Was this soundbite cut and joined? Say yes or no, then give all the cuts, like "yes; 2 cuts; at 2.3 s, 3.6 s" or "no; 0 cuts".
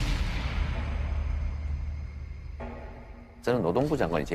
yes; 1 cut; at 2.4 s